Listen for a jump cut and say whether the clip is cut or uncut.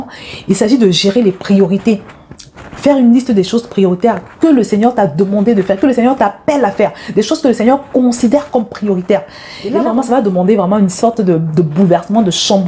cut